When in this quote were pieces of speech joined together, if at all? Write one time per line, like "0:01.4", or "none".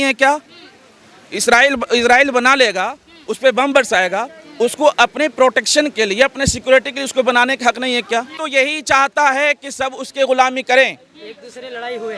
0:08.3